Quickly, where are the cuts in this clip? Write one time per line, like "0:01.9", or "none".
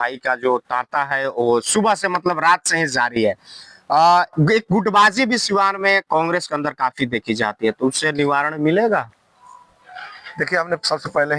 none